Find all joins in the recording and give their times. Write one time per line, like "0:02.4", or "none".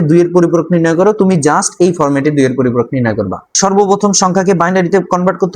0:03.4